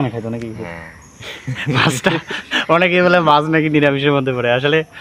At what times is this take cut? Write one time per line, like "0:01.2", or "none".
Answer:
none